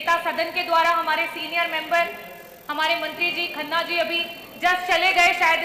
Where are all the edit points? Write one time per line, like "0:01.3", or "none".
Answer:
none